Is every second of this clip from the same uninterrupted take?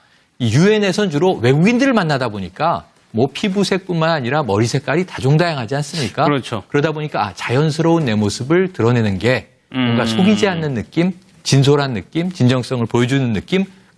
yes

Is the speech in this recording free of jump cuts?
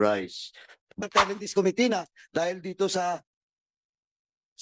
no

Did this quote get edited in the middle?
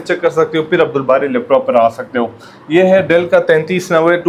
no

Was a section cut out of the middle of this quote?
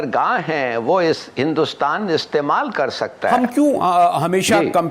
yes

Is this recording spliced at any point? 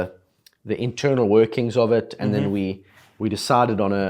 no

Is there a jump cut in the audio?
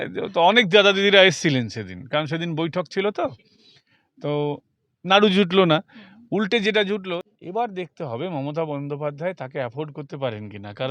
yes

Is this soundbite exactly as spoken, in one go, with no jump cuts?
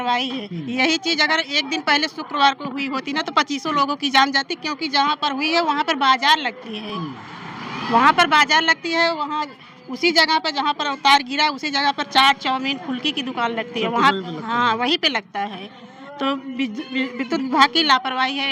yes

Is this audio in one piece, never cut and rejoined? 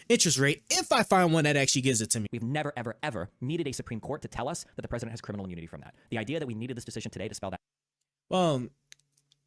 no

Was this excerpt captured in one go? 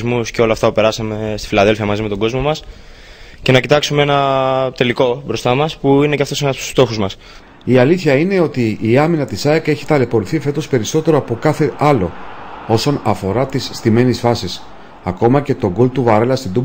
yes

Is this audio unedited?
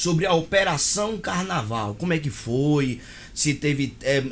yes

